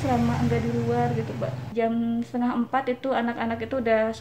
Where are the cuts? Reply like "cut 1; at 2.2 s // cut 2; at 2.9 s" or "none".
cut 1; at 1.6 s